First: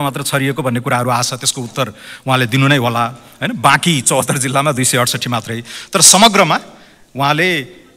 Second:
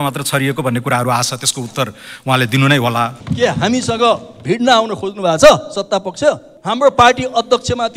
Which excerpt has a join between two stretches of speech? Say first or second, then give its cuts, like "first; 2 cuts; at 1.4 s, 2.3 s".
second; 2 cuts; at 3.2 s, 6.5 s